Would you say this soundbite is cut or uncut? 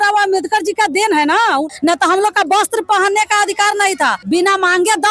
cut